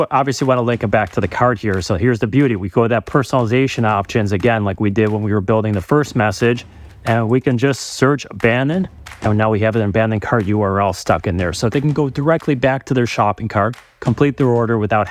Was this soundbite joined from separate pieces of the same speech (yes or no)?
no